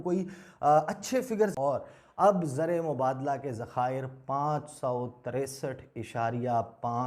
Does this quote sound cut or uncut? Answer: cut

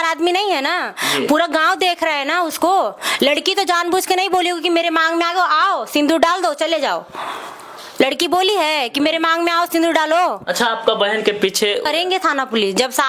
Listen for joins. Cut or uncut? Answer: cut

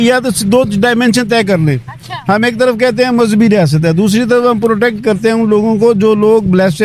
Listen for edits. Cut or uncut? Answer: uncut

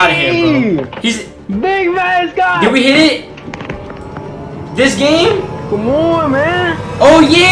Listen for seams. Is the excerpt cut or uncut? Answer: uncut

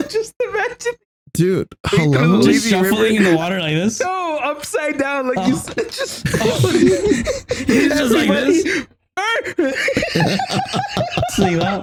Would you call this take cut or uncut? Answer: uncut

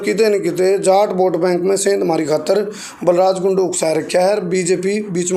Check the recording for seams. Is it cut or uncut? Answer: uncut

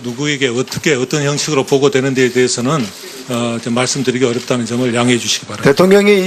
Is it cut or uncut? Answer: uncut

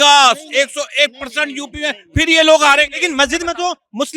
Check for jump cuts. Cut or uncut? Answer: uncut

